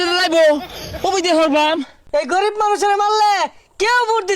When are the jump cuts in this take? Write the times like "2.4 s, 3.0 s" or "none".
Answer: 2.0 s